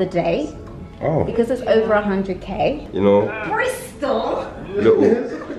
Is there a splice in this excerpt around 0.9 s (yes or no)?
no